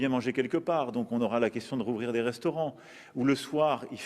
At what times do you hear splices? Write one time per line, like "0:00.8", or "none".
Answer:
0:03.0